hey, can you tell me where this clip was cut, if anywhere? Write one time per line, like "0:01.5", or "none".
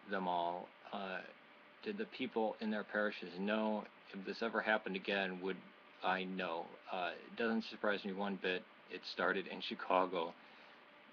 none